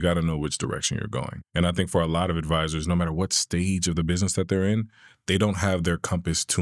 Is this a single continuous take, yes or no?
no